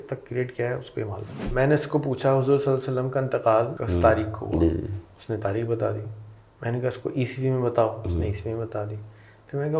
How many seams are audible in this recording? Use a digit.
2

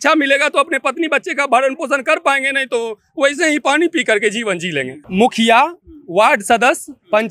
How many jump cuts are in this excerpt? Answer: 1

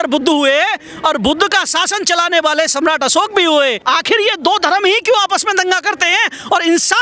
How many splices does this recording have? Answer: 1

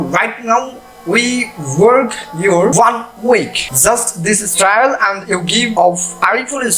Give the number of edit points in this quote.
3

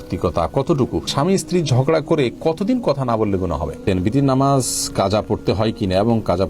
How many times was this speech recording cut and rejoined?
2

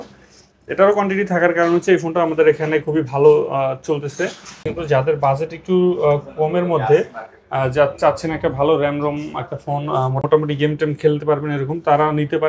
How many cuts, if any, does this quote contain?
2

